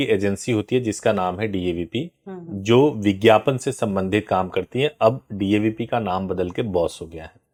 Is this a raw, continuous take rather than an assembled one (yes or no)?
yes